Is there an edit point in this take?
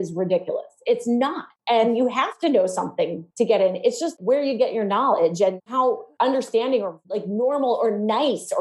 yes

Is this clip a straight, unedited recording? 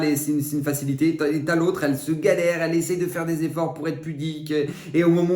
yes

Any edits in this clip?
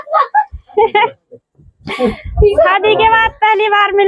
no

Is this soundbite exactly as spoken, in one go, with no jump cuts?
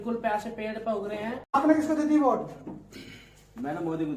no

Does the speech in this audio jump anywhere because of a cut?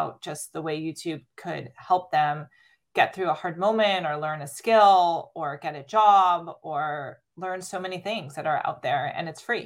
yes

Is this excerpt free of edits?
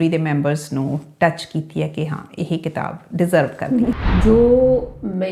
no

